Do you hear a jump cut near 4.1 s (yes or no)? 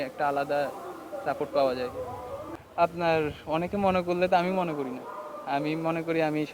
no